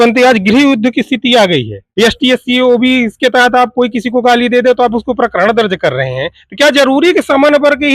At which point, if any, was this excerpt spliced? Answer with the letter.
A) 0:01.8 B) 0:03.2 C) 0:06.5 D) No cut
A